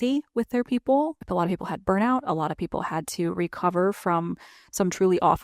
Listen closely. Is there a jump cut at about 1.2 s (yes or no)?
yes